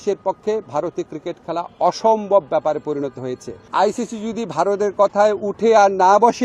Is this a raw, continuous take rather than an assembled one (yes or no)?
no